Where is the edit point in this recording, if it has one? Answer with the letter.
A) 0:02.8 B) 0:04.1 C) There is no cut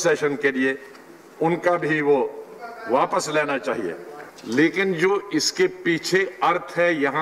B